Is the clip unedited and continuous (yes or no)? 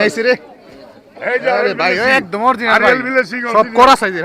yes